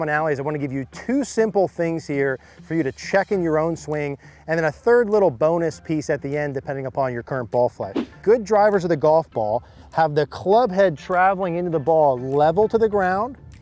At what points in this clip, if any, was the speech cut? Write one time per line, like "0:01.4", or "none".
0:08.2